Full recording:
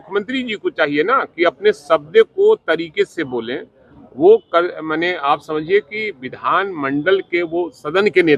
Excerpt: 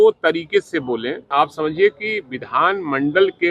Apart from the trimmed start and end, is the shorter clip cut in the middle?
yes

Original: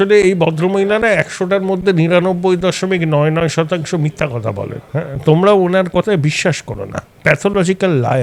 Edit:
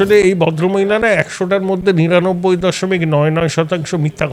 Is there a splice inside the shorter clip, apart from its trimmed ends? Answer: no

